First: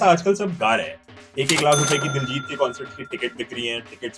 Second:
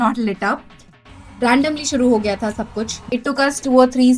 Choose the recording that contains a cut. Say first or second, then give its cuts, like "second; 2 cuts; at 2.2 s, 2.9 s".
second; 2 cuts; at 1.0 s, 3.0 s